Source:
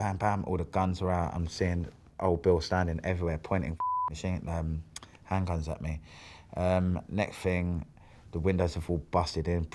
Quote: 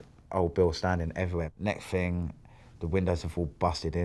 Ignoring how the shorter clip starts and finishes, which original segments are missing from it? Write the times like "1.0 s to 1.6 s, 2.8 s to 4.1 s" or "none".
3.4 s to 7.0 s